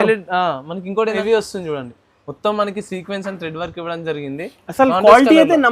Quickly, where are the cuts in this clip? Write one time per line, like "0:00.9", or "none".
0:01.1